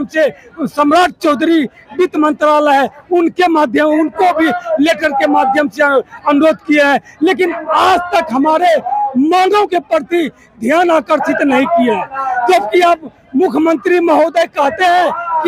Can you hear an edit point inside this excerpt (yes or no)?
no